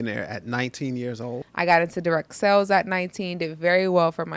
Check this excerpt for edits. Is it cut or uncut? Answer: cut